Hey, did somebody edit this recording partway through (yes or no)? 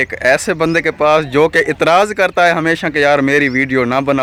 no